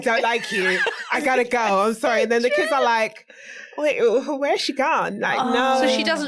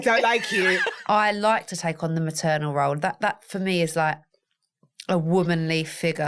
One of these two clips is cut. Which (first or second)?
second